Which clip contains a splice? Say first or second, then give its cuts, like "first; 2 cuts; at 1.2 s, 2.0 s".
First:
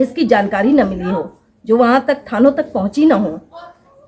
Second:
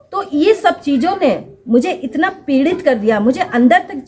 second; 1 cut; at 2.9 s